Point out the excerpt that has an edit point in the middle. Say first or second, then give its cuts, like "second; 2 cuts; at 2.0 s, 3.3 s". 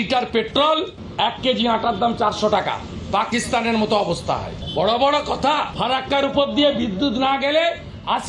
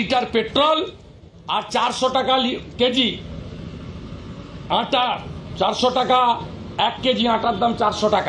first; 3 cuts; at 1.0 s, 4.6 s, 5.7 s